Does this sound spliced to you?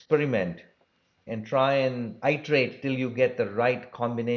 yes; 2 cuts; at 1.3 s, 2.2 s

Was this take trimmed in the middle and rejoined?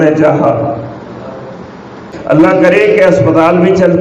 yes; 1 cut; at 2.1 s

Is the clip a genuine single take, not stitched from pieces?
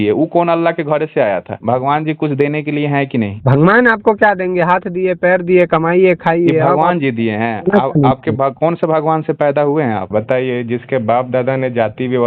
no; 3 cuts; at 1.5 s, 3.4 s, 10.1 s

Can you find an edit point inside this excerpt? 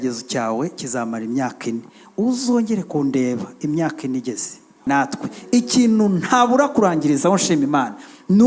yes; 1 cut; at 4.9 s

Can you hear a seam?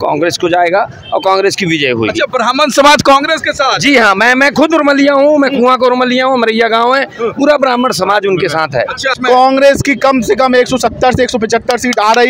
yes; 1 cut; at 9.2 s

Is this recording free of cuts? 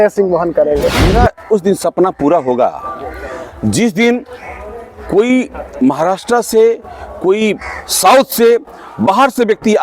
no; 1 cut; at 1.1 s

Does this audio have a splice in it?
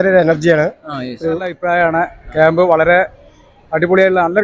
yes; 1 cut; at 1.6 s

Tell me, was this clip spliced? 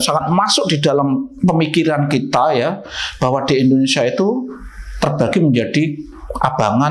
no; 0 cuts

